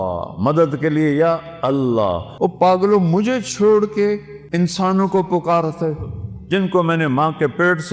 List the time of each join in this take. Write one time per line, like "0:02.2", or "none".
0:02.2
0:04.4